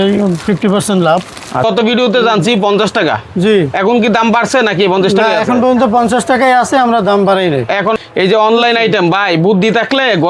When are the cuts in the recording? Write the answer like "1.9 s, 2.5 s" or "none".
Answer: 1.6 s, 8.0 s